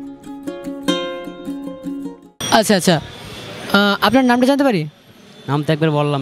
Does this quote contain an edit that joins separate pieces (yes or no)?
yes